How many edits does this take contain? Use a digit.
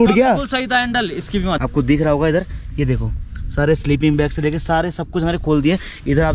1